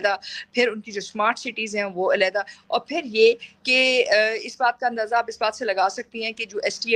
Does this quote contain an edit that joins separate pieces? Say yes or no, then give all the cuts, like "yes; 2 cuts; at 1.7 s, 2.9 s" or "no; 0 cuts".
no; 0 cuts